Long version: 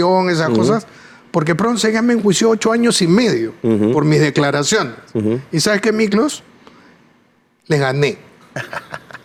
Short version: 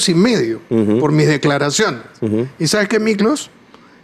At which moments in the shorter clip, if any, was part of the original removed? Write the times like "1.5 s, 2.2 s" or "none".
none